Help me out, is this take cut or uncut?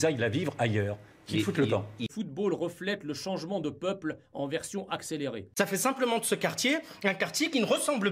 cut